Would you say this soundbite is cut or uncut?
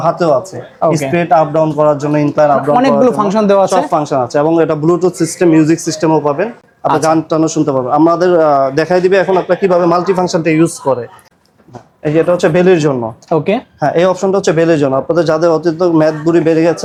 uncut